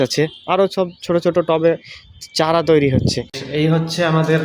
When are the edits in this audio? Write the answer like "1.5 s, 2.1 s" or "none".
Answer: 3.4 s